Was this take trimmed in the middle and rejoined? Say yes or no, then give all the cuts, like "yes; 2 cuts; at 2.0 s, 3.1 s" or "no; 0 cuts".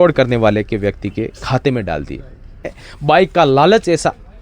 yes; 1 cut; at 2.9 s